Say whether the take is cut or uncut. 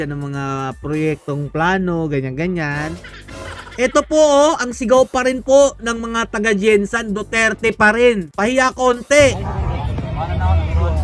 uncut